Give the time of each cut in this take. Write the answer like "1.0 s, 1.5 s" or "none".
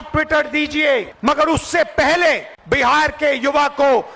1.1 s, 2.5 s